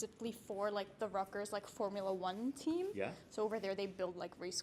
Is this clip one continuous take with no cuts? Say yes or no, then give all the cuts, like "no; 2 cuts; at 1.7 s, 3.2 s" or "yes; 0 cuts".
yes; 0 cuts